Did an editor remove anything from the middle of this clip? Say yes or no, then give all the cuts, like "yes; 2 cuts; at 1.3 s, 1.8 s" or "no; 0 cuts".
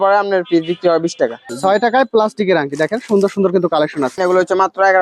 yes; 2 cuts; at 1.5 s, 4.2 s